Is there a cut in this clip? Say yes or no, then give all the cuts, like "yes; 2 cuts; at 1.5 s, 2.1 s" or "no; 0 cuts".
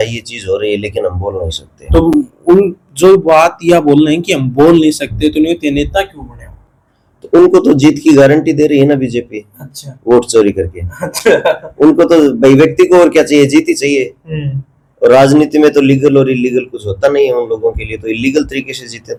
no; 0 cuts